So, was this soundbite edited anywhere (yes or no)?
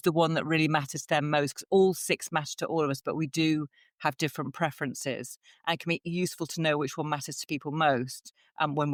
no